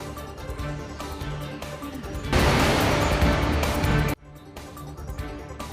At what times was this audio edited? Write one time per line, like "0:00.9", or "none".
0:01.4
0:02.0